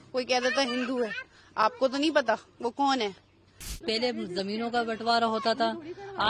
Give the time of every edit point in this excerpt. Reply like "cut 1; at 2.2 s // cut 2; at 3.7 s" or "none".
cut 1; at 3.8 s